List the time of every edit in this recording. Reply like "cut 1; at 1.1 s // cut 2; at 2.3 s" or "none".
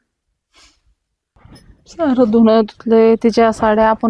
cut 1; at 1.4 s